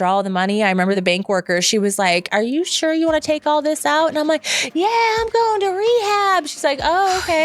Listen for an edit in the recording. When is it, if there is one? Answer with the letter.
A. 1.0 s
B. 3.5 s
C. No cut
A